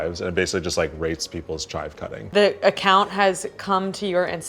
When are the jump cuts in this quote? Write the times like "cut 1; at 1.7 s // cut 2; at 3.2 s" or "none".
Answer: cut 1; at 2.1 s